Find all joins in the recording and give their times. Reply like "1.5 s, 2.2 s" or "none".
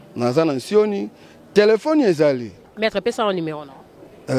none